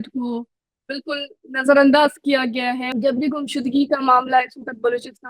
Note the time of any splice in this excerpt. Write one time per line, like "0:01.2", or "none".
0:02.8

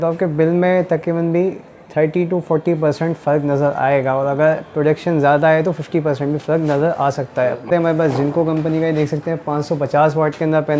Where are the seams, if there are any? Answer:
0:07.7

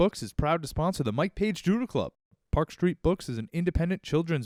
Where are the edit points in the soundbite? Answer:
none

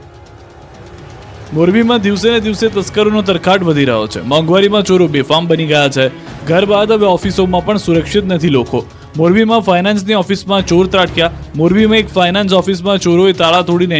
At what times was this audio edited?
0:05.4

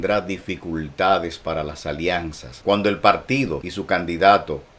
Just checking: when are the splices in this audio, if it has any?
0:02.4
0:03.7

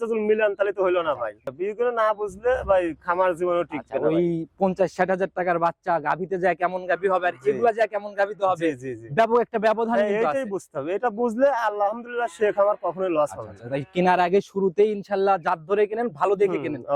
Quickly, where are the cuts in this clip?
none

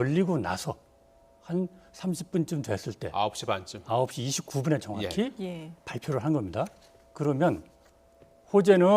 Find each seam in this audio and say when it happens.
0:05.0

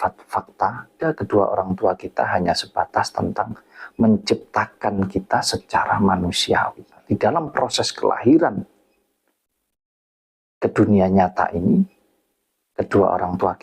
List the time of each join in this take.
0:01.0
0:07.0

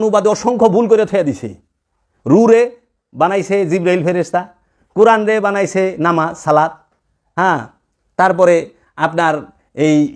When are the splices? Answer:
none

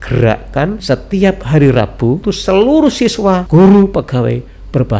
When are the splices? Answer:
0:00.8
0:02.2
0:03.4

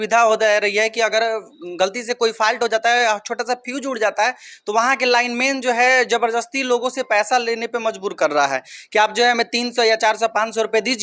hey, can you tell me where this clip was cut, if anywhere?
none

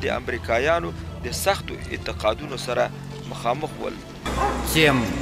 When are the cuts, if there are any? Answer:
0:04.3

